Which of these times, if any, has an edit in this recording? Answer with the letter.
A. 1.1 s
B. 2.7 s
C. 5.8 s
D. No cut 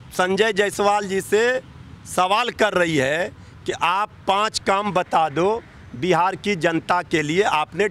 D